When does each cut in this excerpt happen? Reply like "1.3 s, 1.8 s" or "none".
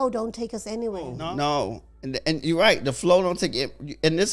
none